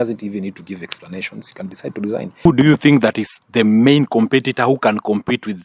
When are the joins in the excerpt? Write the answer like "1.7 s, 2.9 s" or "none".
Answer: 2.4 s